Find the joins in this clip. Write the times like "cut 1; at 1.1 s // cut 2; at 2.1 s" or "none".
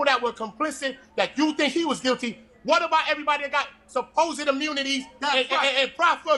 none